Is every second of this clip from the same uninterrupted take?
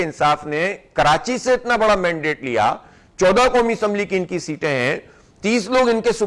yes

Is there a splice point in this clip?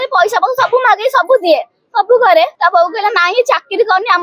yes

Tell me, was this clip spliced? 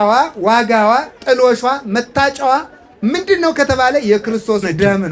no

